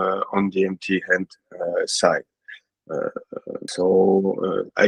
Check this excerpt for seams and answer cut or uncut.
uncut